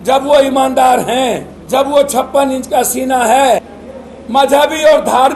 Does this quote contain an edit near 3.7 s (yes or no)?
yes